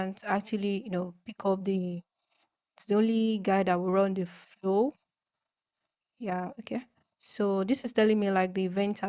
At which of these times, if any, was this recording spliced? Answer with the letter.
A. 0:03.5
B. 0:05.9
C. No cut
C